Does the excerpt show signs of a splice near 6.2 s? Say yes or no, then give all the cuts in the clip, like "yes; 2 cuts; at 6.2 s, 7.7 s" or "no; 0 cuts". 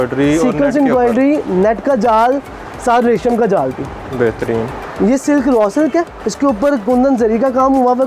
yes; 2 cuts; at 4.8 s, 6.2 s